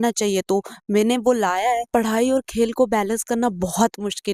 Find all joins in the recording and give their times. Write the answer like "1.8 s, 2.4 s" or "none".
1.8 s